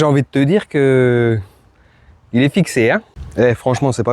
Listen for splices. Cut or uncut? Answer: cut